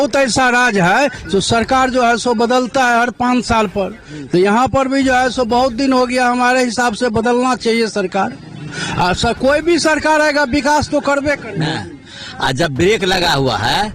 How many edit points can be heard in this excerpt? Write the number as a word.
one